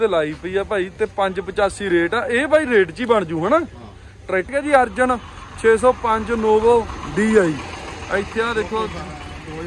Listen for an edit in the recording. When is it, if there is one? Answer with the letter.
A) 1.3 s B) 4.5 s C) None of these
B